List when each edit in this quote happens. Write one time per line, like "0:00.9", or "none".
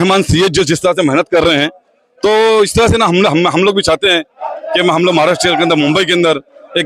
none